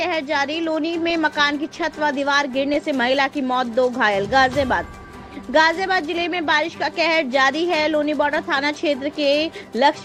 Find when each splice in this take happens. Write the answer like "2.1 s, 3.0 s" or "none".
none